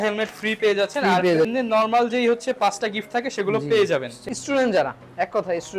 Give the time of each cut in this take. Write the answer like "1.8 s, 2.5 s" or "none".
1.5 s, 4.2 s

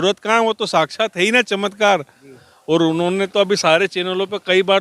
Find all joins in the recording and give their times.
none

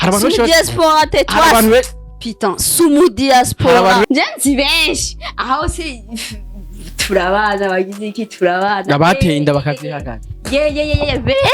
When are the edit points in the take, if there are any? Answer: 4.0 s

